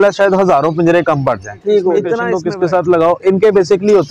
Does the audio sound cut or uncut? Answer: cut